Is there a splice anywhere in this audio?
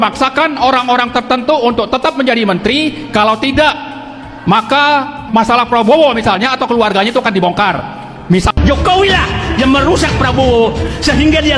yes; 1 cut; at 8.5 s

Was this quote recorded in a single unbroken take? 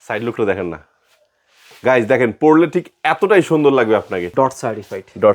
no; 1 cut; at 4.2 s

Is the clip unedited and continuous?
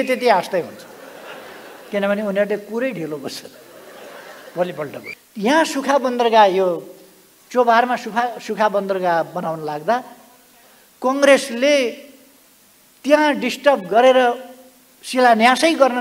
no; 1 cut; at 5.1 s

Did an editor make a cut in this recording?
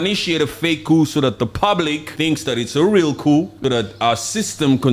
yes; 2 cuts; at 2.1 s, 3.5 s

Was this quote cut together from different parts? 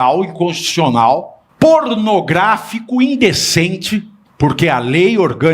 yes; 2 cuts; at 1.4 s, 4.2 s

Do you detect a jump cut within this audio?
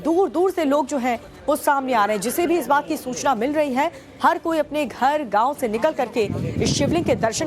yes; 1 cut; at 5.6 s

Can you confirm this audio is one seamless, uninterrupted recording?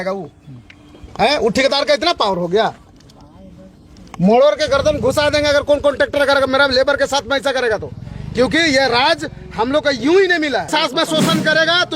no; 1 cut; at 10.7 s

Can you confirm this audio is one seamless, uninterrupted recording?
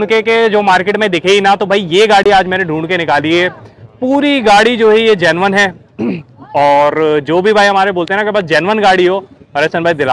yes; 0 cuts

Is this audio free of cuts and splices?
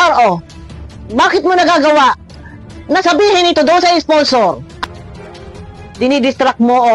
no; 1 cut; at 4.7 s

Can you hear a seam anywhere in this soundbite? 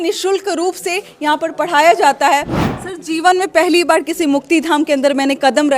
yes; 1 cut; at 2.6 s

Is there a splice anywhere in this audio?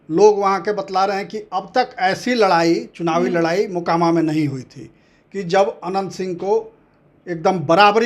no; 0 cuts

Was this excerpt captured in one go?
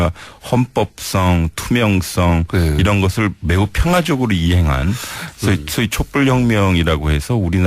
no; 1 cut; at 0.9 s

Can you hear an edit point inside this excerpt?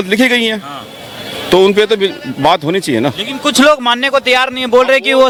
no; 0 cuts

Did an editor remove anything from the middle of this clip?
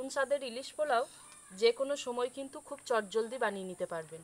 no; 0 cuts

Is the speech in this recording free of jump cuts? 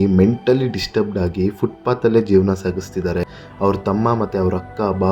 yes; 0 cuts

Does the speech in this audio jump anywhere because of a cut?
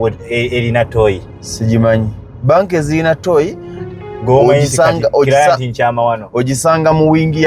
no; 0 cuts

